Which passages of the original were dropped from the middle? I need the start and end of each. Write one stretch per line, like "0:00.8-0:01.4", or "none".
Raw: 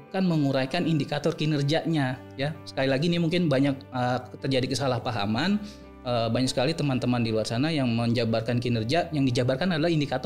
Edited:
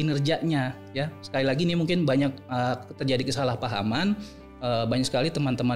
none